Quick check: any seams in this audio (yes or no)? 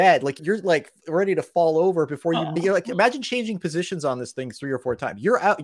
no